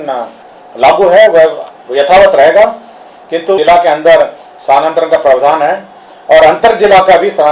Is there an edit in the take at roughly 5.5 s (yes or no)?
no